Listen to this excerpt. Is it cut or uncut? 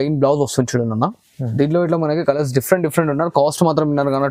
uncut